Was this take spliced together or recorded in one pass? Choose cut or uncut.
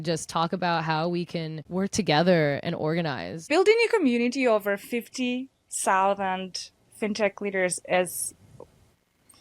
cut